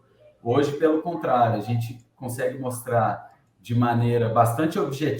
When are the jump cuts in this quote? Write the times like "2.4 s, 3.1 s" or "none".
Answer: none